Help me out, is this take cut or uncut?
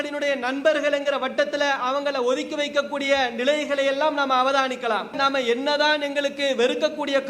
cut